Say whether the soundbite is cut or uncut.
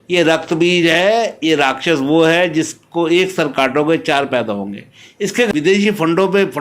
cut